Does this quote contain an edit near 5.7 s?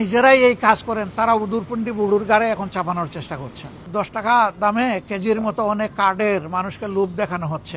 no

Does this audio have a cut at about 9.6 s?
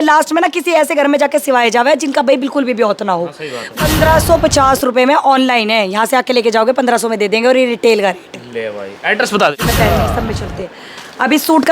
yes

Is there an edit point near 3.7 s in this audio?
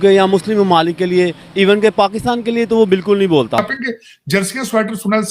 yes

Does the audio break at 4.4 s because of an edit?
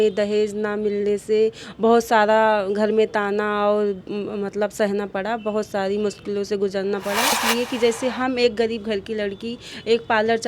no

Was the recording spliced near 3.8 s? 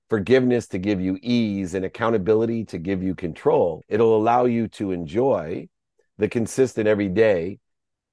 yes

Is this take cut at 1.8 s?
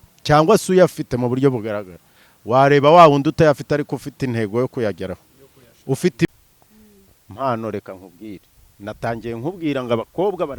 no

